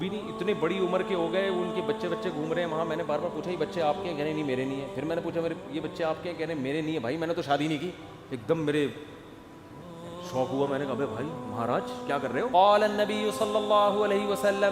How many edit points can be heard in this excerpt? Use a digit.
1